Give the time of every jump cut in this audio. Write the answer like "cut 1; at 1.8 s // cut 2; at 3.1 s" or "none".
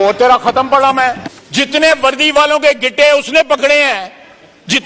cut 1; at 1.3 s